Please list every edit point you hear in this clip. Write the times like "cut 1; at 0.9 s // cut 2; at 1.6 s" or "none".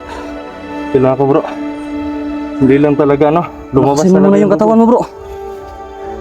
none